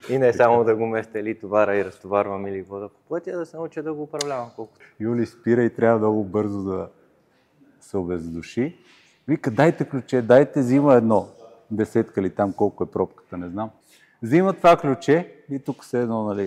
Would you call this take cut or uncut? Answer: cut